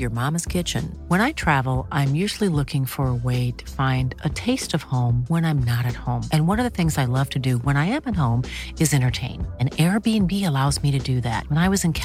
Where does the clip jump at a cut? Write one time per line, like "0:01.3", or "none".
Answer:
none